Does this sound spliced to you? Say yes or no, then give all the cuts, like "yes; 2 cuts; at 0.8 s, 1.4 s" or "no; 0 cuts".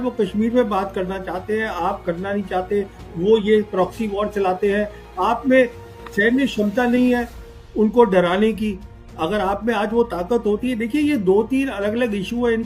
no; 0 cuts